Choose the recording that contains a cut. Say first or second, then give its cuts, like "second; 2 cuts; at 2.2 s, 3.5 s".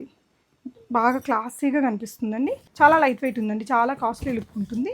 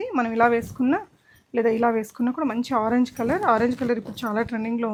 first; 1 cut; at 2.6 s